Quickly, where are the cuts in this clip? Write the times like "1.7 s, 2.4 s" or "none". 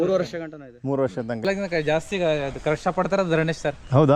1.4 s